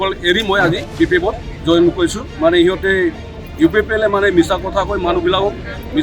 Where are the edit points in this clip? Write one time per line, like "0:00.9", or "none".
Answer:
0:01.5